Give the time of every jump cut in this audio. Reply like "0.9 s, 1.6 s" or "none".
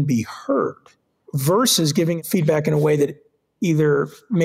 1.2 s, 2.2 s